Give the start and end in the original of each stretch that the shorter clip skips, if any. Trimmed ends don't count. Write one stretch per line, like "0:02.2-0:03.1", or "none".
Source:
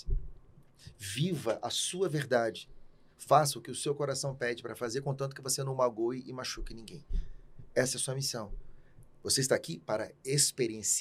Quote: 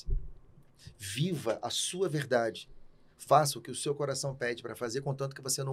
none